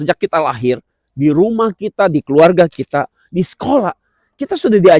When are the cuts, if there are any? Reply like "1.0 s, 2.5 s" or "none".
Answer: none